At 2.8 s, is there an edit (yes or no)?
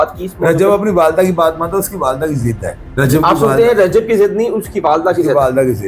yes